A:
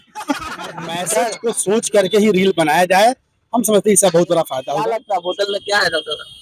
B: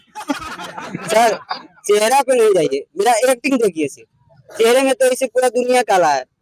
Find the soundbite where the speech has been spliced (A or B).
A